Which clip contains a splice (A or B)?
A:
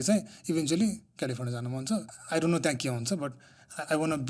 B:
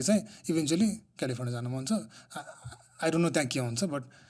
A